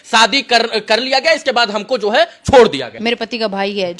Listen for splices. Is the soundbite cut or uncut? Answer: cut